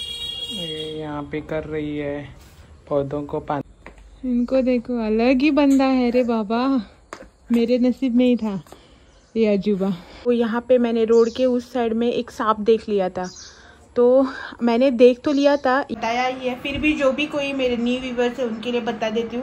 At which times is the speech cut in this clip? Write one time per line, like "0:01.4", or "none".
0:03.6
0:10.3
0:15.9

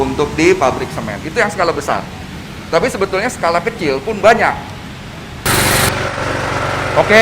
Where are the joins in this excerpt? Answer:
0:05.5

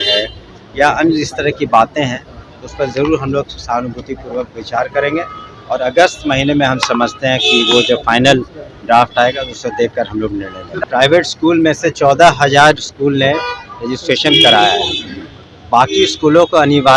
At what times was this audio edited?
0:10.7

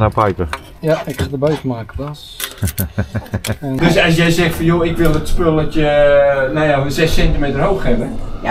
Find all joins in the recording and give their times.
0:03.7

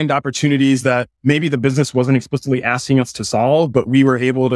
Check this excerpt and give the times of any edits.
0:01.1

